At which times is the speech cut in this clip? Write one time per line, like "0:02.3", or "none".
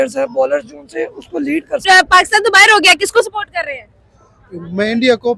0:01.8